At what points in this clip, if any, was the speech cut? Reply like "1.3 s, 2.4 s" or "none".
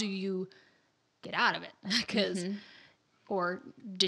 none